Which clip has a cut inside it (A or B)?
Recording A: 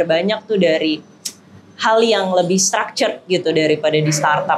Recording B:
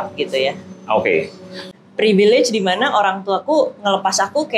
B